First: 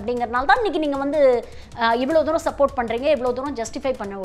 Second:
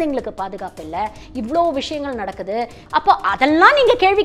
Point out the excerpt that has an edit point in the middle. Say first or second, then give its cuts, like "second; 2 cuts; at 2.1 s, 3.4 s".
second; 2 cuts; at 1.2 s, 2.8 s